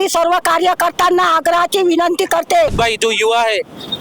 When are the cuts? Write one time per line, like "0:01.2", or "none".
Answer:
0:02.7